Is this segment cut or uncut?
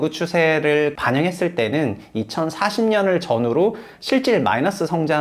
uncut